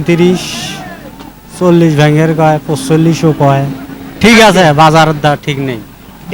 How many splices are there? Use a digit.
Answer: 0